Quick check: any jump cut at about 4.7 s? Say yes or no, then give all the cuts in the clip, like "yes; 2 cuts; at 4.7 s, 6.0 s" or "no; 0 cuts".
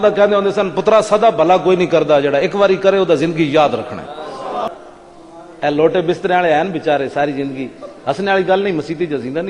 yes; 1 cut; at 4.7 s